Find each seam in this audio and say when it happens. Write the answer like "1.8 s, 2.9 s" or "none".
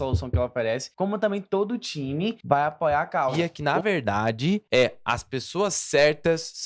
0.9 s, 2.4 s, 3.5 s, 4.6 s

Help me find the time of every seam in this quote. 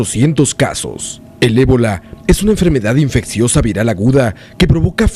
0.9 s

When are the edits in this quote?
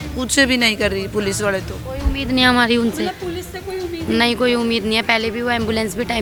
none

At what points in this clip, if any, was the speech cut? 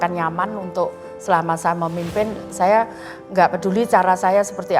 1.1 s

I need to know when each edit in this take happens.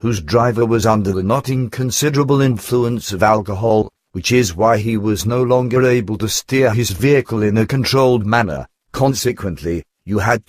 2.9 s

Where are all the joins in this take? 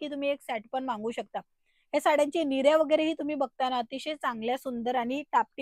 none

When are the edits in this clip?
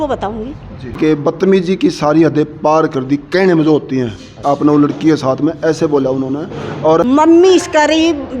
1.0 s, 7.0 s

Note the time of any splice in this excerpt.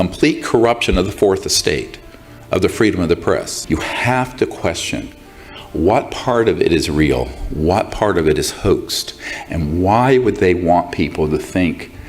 3.5 s

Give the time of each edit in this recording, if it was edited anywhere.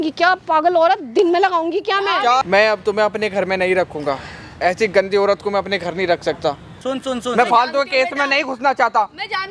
2.5 s, 6.7 s

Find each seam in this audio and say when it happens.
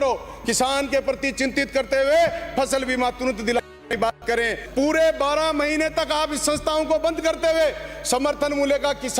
4.6 s

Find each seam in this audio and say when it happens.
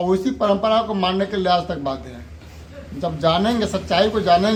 none

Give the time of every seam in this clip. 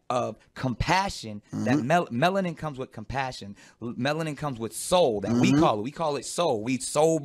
3.6 s

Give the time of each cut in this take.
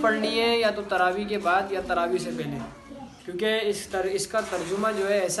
none

